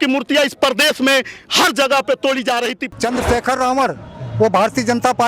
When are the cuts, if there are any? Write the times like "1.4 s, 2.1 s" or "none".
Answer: 2.8 s